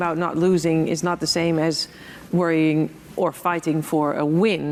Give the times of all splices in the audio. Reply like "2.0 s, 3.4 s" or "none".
none

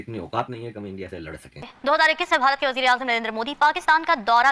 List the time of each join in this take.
1.7 s

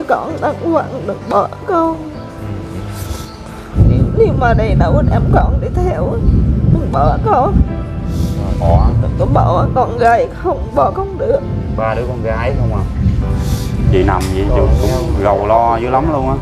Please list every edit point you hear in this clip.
3.7 s, 8.6 s, 13.9 s

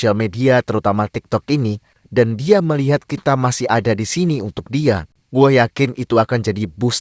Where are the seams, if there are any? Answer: 5.1 s

